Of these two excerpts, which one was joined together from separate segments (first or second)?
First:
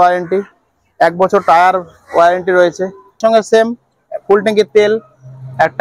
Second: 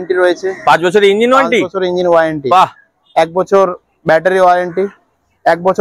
first